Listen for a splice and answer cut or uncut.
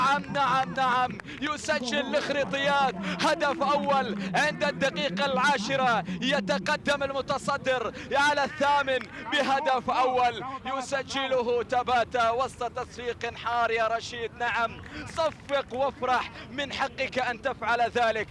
uncut